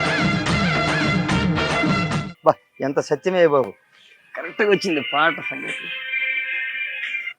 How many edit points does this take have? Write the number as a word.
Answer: one